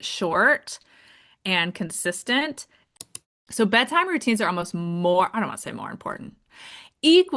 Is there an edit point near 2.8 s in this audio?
yes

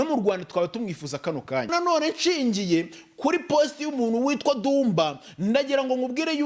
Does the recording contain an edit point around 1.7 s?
yes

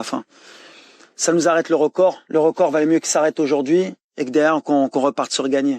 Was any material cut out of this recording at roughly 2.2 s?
yes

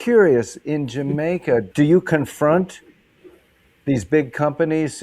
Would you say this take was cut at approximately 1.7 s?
yes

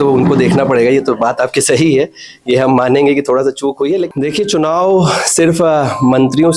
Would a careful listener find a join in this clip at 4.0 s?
yes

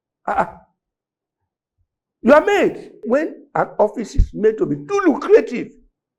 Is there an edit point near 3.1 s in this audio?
yes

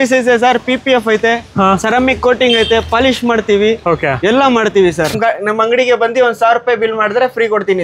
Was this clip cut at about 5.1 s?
yes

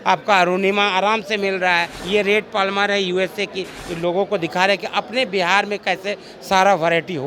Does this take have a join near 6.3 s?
no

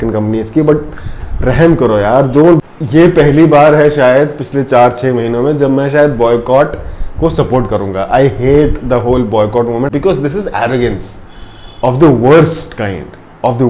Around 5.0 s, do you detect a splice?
no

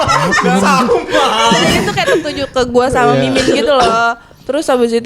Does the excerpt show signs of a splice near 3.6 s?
no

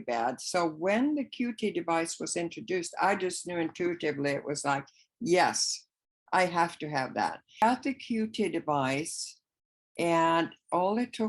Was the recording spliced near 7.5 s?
yes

